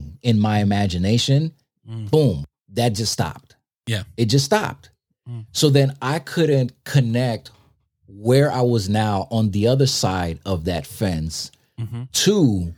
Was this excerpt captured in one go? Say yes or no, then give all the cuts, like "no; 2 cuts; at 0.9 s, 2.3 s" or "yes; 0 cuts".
no; 1 cut; at 2.5 s